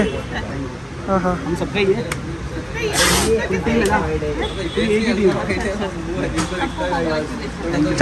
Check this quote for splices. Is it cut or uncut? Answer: uncut